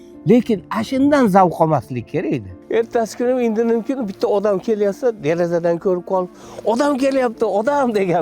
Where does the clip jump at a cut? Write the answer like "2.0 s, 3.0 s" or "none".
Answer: 2.5 s